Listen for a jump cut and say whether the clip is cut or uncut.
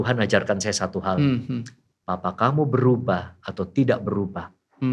uncut